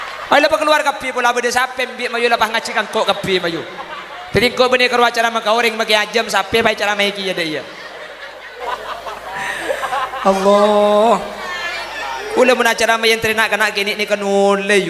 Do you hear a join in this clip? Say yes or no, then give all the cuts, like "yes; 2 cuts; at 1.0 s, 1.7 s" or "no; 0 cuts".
yes; 1 cut; at 8.6 s